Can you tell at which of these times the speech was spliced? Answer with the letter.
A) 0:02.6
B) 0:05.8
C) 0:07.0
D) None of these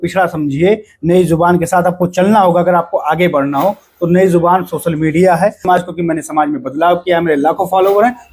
B